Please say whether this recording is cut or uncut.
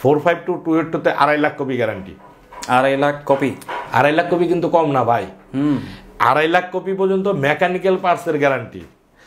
uncut